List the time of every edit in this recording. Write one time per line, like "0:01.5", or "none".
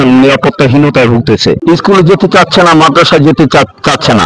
0:01.6